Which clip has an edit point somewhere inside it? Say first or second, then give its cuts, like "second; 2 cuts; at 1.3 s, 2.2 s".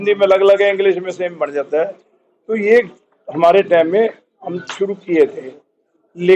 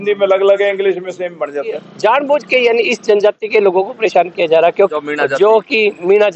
second; 2 cuts; at 1.7 s, 4.9 s